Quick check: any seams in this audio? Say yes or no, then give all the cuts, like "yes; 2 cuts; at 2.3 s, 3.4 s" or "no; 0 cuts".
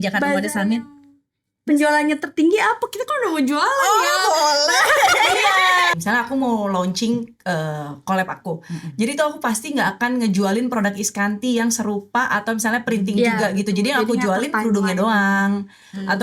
yes; 1 cut; at 5.9 s